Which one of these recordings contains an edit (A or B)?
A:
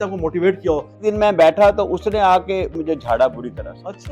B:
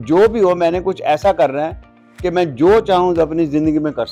A